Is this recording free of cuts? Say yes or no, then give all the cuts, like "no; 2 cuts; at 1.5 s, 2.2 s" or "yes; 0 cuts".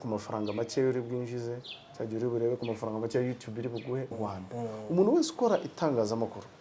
no; 1 cut; at 4.1 s